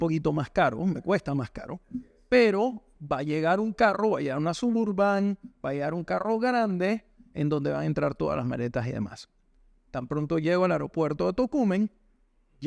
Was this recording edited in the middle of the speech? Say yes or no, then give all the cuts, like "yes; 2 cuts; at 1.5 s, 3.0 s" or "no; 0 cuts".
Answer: no; 0 cuts